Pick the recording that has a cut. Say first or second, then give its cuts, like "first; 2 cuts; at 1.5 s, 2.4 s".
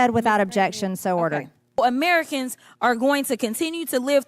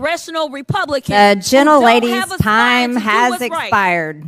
first; 1 cut; at 1.8 s